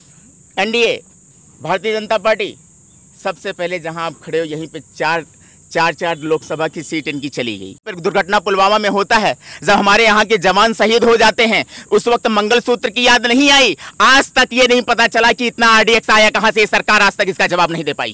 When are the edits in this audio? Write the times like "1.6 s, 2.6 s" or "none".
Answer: 7.9 s